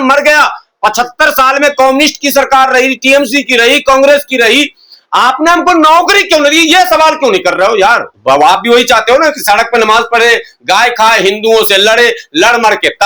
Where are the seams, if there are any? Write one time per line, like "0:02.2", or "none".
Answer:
0:08.1